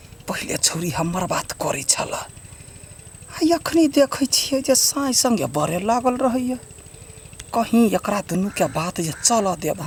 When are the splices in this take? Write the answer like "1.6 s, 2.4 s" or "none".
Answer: none